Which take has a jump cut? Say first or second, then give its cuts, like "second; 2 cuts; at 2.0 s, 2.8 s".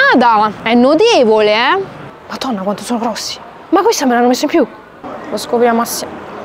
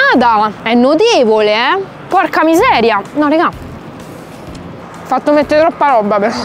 first; 2 cuts; at 1.9 s, 5.2 s